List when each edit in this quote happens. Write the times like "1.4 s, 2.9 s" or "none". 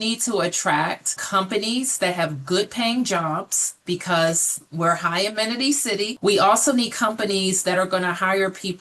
1.2 s, 6.1 s